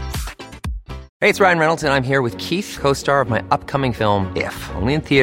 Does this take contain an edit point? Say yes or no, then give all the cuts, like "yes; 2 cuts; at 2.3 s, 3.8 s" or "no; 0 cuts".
yes; 1 cut; at 1.1 s